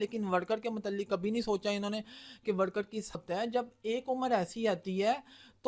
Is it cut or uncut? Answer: cut